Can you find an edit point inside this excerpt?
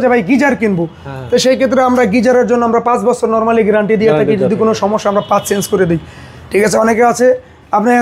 no; 0 cuts

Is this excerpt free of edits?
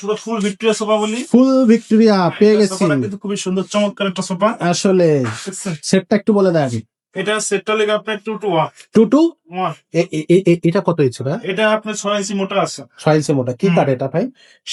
yes; 0 cuts

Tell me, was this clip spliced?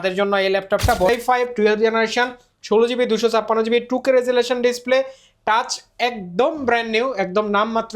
yes; 1 cut; at 1.1 s

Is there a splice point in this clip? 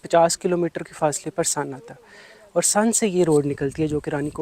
no; 0 cuts

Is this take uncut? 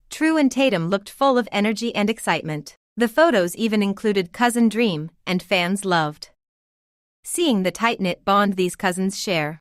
yes; 0 cuts

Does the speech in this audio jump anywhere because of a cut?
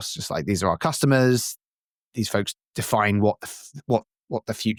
no; 0 cuts

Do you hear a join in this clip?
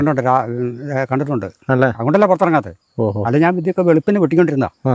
no; 0 cuts

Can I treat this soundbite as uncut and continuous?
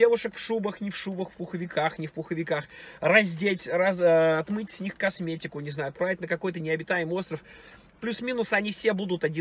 yes; 0 cuts

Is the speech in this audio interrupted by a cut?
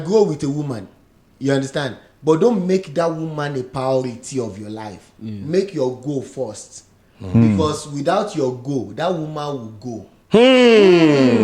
no; 0 cuts

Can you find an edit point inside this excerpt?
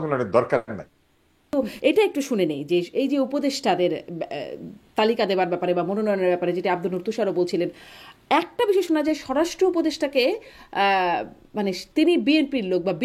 yes; 1 cut; at 1.5 s

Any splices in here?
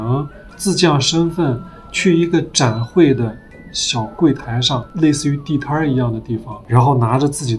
no; 0 cuts

